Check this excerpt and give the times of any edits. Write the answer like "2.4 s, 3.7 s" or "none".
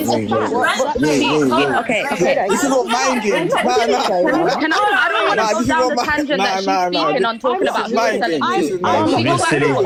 none